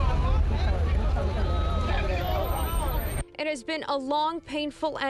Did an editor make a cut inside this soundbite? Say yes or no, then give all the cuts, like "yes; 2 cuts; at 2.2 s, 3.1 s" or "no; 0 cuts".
no; 0 cuts